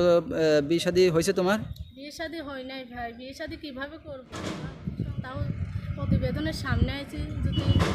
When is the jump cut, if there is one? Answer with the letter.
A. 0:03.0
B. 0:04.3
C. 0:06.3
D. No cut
B